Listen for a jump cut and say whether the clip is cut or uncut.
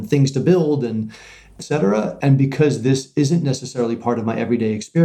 cut